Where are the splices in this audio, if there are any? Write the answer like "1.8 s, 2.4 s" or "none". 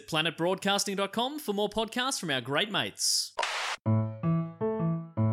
3.9 s